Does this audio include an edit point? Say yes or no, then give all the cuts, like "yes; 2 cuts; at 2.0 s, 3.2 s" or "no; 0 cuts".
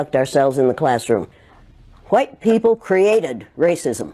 yes; 1 cut; at 1.4 s